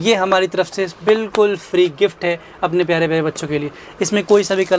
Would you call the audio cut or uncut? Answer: uncut